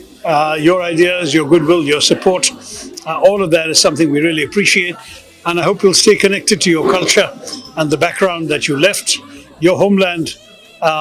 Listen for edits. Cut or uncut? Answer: uncut